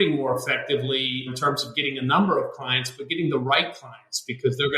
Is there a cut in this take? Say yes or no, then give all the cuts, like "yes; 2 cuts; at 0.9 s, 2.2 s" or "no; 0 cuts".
yes; 1 cut; at 1.3 s